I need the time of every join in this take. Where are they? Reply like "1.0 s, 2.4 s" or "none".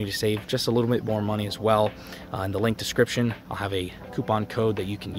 none